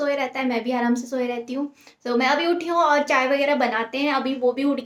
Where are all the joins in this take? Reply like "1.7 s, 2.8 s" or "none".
none